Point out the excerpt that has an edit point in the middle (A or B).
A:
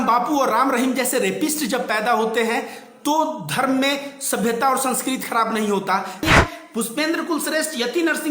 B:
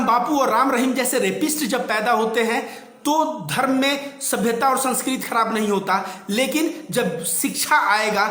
A